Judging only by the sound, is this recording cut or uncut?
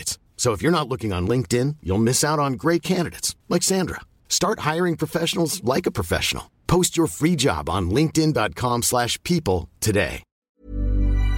cut